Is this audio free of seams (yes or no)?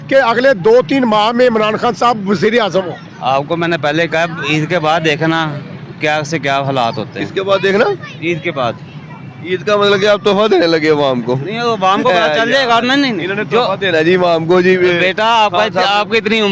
yes